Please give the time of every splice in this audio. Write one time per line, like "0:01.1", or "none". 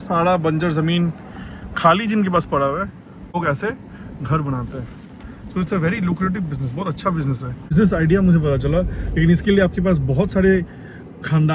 0:03.3
0:07.5